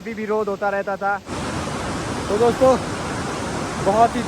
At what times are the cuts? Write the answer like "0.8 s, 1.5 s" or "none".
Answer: 1.3 s